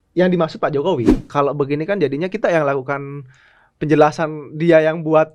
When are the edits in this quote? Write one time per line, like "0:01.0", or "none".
0:01.2